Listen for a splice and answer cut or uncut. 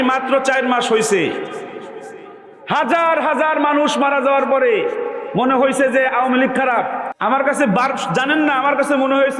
cut